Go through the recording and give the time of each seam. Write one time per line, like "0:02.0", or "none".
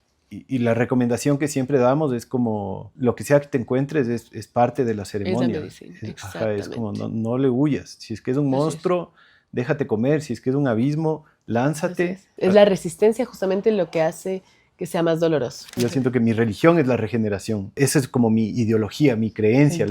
0:12.2
0:15.6
0:17.8

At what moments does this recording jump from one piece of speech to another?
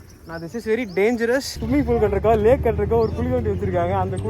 0:01.6

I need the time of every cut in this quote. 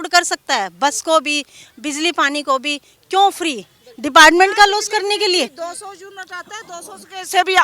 none

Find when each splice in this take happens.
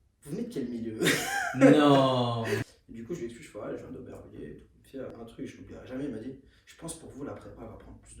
0:02.7
0:05.1

